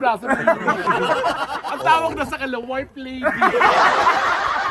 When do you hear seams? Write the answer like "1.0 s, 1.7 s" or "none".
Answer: none